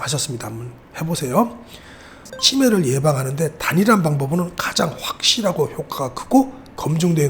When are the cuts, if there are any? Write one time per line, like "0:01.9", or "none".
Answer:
0:02.2